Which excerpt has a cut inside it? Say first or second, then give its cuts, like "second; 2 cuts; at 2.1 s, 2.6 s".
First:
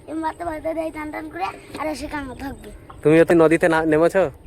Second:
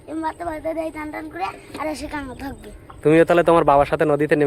first; 1 cut; at 3.3 s